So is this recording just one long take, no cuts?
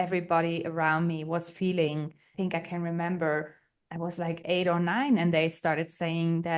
no; 1 cut; at 2.2 s

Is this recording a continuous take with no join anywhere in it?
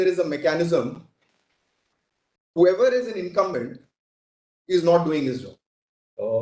yes; 0 cuts

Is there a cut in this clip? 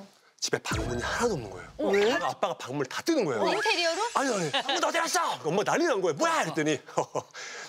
yes; 3 cuts; at 2.3 s, 3.5 s, 4.8 s

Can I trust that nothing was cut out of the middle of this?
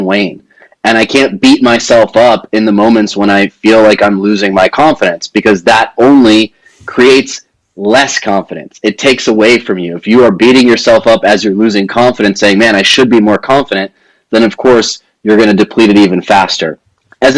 yes; 0 cuts

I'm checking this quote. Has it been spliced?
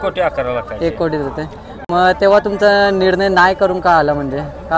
no; 0 cuts

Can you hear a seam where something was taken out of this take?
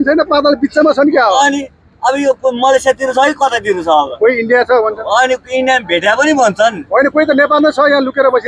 no; 0 cuts

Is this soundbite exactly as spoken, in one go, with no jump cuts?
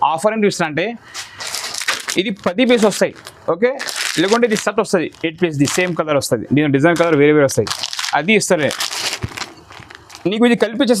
yes; 0 cuts

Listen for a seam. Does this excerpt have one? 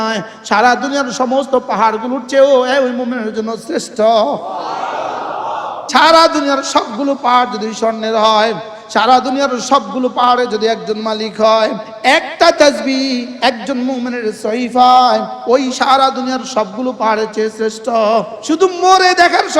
yes; 4 cuts; at 5.8 s, 11.9 s, 15.3 s, 18.3 s

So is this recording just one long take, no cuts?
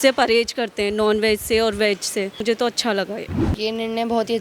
no; 2 cuts; at 2.4 s, 3.4 s

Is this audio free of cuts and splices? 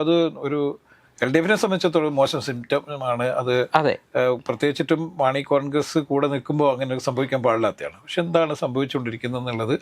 yes; 0 cuts

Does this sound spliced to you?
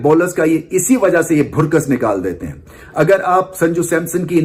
no; 0 cuts

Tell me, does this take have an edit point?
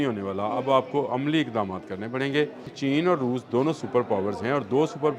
yes; 1 cut; at 2.8 s

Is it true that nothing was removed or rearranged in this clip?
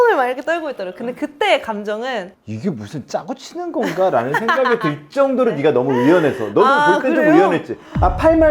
no; 1 cut; at 2.4 s

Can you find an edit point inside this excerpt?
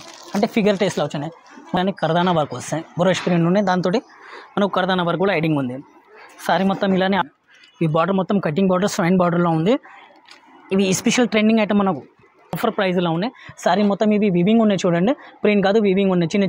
yes; 3 cuts; at 1.8 s, 7.2 s, 12.6 s

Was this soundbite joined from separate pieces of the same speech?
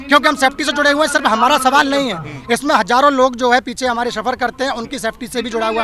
no; 0 cuts

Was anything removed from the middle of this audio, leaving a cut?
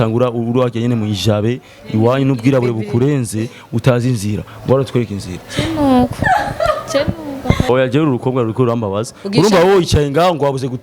yes; 1 cut; at 7.7 s

